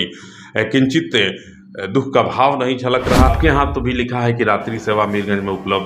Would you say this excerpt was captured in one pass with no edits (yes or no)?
no